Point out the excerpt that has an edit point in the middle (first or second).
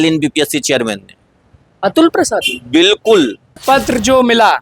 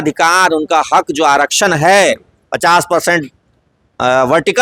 first